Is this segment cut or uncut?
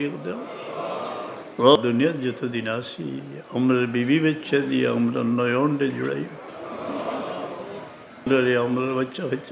cut